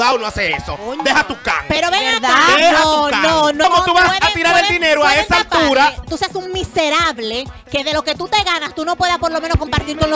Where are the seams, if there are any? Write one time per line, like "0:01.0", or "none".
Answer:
0:03.6
0:06.1